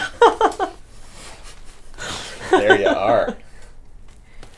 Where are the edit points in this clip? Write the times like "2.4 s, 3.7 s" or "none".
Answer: none